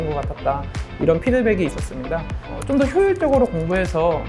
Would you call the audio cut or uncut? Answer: cut